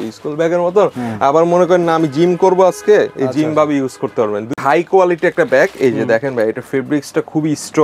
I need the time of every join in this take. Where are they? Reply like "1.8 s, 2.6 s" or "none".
4.6 s

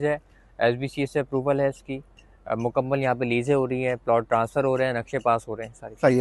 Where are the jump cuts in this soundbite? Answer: none

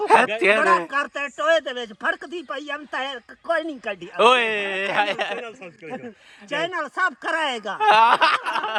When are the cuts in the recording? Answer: none

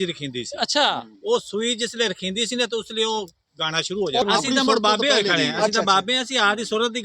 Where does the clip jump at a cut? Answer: 4.2 s

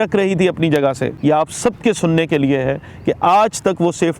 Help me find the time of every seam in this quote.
1.1 s

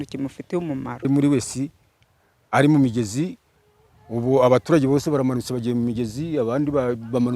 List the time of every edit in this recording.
1.0 s

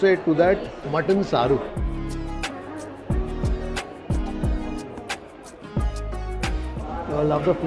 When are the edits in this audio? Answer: none

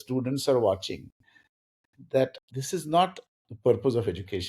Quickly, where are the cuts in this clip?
2.4 s

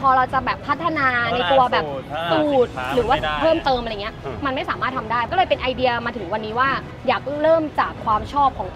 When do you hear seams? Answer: 5.3 s, 6.9 s

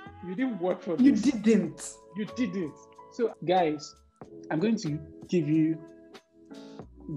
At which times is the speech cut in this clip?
3.4 s

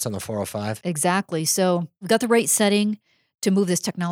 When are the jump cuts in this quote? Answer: 1.9 s

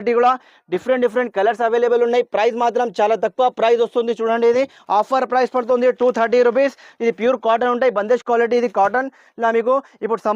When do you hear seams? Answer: none

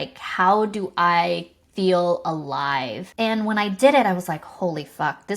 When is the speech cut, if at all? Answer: 3.0 s

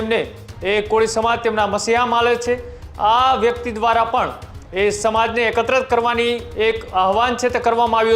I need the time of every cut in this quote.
none

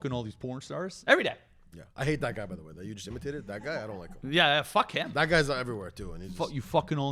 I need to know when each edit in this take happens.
none

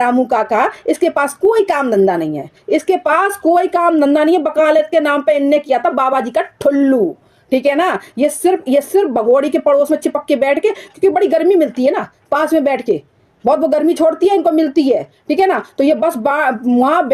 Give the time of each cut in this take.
none

